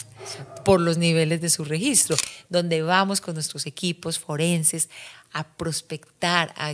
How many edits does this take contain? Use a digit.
1